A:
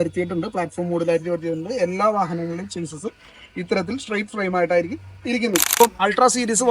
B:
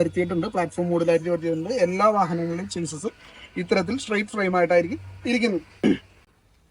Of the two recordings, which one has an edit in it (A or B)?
A